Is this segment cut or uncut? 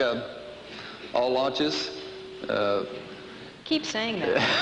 uncut